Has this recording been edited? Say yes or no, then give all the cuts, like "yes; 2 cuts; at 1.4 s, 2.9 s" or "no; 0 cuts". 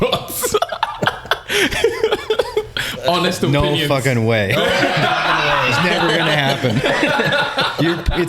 no; 0 cuts